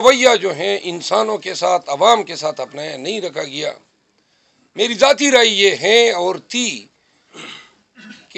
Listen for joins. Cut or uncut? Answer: uncut